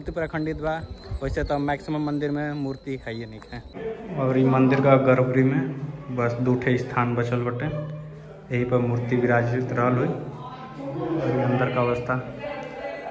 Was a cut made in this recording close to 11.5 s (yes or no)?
no